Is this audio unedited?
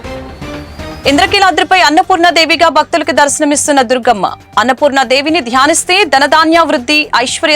no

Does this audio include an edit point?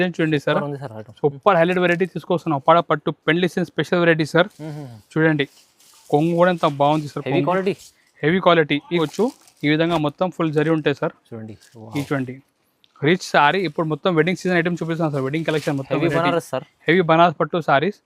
yes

